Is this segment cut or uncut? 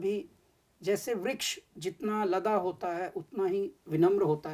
uncut